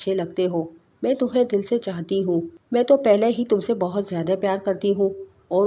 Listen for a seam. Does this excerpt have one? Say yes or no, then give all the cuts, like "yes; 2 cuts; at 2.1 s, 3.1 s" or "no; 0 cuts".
yes; 1 cut; at 2.6 s